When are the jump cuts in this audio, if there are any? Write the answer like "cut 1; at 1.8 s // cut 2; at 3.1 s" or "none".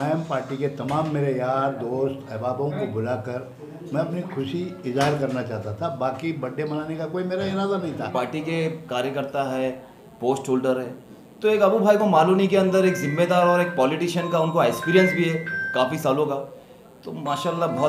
cut 1; at 8.1 s